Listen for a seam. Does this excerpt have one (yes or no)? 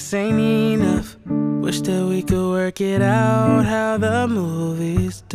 no